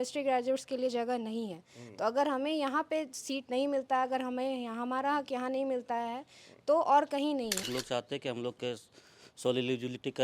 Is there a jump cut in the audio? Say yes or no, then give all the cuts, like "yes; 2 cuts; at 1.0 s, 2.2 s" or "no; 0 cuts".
yes; 1 cut; at 7.6 s